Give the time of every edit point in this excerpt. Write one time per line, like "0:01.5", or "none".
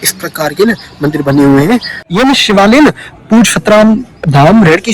0:02.0